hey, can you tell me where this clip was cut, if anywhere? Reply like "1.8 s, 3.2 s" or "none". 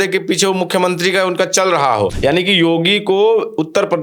2.1 s

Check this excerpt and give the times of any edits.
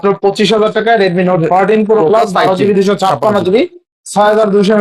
none

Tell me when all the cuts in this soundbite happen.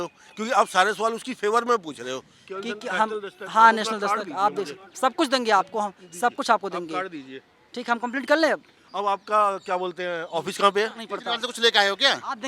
2.4 s, 11.1 s

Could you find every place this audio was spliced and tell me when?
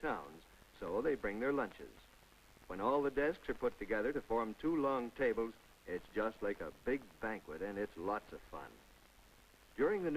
4.3 s

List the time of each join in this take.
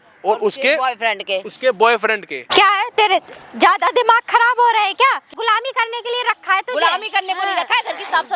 2.4 s, 5.3 s

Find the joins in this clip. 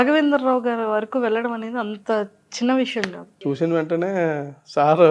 3.4 s

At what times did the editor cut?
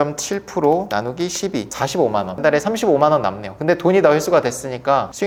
none

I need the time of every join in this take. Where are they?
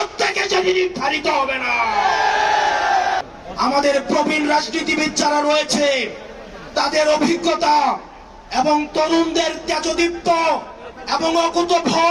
3.4 s

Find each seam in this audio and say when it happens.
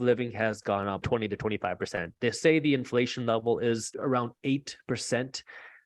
1.0 s, 3.9 s

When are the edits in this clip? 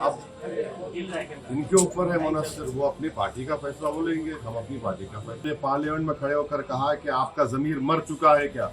5.4 s

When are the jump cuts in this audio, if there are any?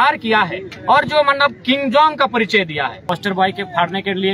3.0 s

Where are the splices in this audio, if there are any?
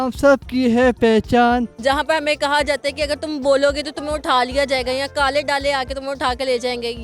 1.7 s

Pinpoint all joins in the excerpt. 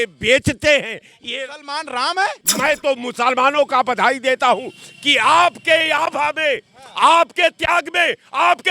2.4 s

